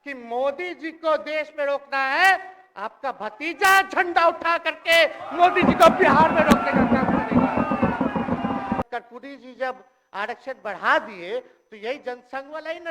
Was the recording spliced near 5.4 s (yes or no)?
no